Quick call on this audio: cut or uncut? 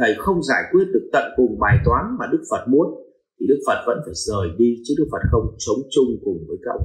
uncut